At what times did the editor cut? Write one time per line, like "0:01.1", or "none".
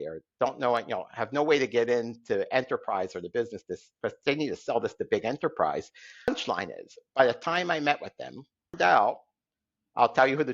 0:06.3
0:08.7